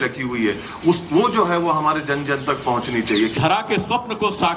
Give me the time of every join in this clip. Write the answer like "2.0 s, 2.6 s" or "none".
3.3 s